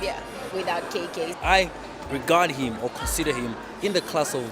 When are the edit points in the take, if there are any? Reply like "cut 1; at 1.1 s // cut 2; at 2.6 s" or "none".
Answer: cut 1; at 1.3 s